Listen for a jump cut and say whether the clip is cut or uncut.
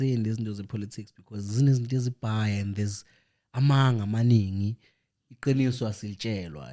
uncut